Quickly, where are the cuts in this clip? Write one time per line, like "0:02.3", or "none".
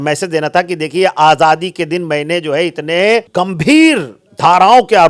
0:03.4